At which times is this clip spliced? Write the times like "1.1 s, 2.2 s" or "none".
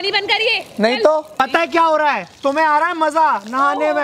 1.3 s